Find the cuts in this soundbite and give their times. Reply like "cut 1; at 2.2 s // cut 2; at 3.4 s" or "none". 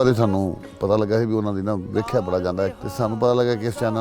cut 1; at 2.8 s